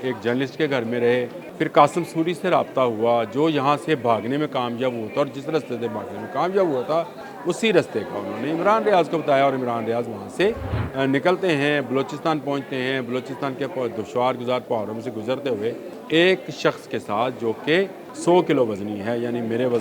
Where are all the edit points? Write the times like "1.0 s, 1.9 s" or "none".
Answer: 1.4 s, 7.2 s, 10.7 s, 15.9 s, 18.1 s